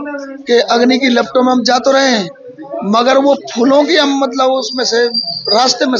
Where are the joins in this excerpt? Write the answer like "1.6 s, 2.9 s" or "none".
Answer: none